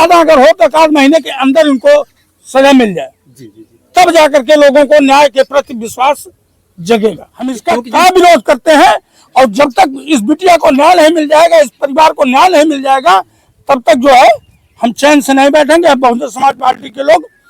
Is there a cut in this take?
yes; 1 cut; at 7.6 s

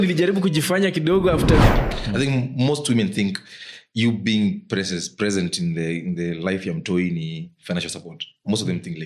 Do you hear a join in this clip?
yes; 1 cut; at 1.8 s

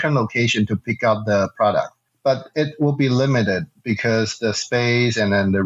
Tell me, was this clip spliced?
yes; 1 cut; at 2.0 s

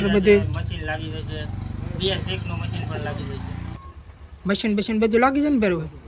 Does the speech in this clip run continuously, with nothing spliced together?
no; 1 cut; at 3.7 s

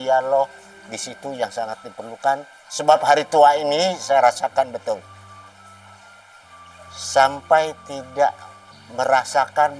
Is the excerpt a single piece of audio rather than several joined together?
yes; 0 cuts

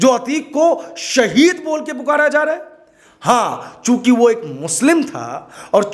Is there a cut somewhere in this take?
no; 0 cuts

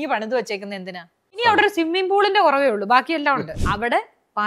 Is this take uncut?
no; 2 cuts; at 1.4 s, 3.6 s

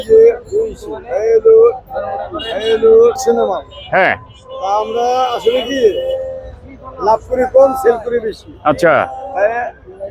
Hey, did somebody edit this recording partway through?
yes; 1 cut; at 3.2 s

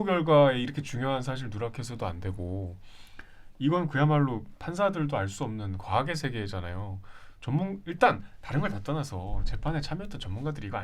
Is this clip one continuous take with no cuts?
yes; 0 cuts

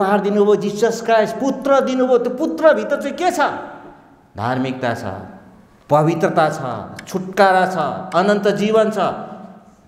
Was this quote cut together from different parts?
no; 0 cuts

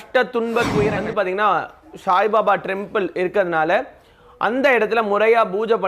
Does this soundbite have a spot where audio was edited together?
yes; 1 cut; at 1.0 s

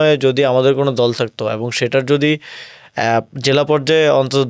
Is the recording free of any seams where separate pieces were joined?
yes; 0 cuts

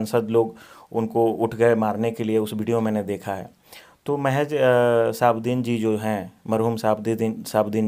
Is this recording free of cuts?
yes; 0 cuts

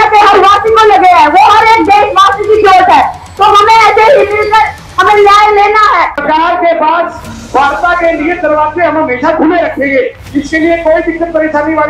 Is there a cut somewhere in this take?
yes; 1 cut; at 6.2 s

